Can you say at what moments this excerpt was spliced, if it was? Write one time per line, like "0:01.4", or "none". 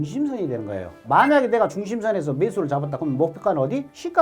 0:01.0

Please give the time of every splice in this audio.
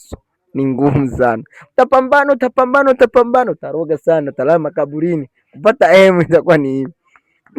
none

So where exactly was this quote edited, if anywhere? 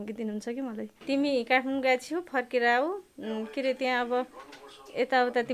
0:00.9

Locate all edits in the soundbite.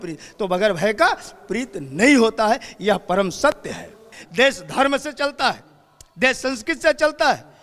0:04.2

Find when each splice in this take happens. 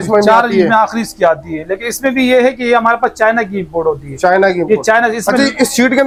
none

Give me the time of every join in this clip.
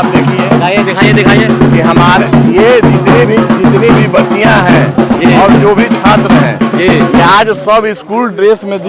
none

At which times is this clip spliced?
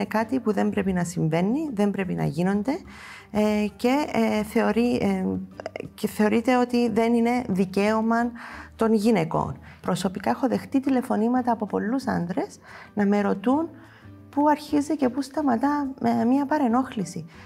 0:09.7

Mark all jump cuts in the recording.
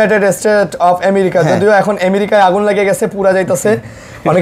none

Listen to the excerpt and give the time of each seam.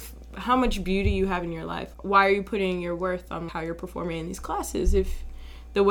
none

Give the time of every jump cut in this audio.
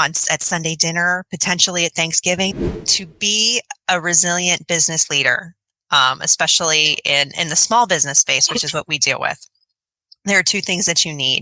0:02.8

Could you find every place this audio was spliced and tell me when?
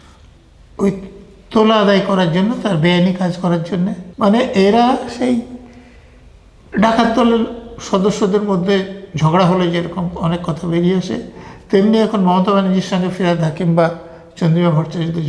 0:04.0

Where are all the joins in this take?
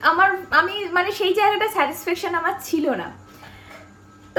none

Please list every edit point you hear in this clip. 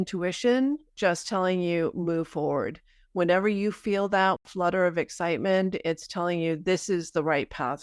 0:04.4

